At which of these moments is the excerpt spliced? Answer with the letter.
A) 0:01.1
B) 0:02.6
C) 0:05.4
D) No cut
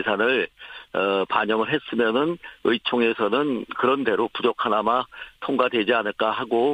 C